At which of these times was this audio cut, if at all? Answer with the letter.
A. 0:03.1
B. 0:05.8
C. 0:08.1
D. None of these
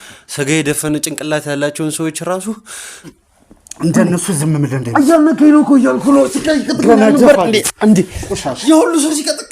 A